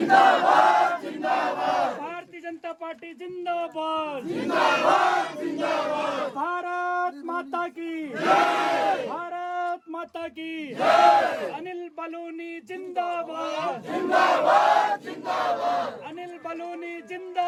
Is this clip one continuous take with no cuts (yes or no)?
yes